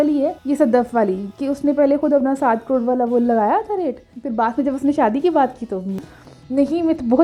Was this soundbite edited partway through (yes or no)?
no